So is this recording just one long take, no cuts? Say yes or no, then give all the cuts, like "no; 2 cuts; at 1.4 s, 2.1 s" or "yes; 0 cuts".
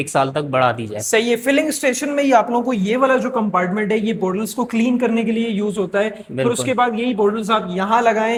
yes; 0 cuts